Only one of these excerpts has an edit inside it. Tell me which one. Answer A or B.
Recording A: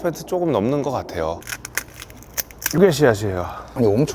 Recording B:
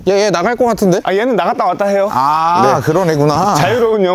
A